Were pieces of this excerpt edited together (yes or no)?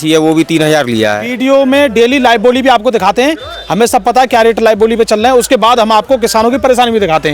yes